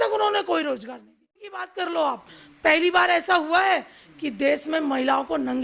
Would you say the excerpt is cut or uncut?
cut